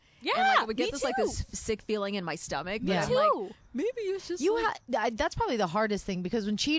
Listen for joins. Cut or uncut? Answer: uncut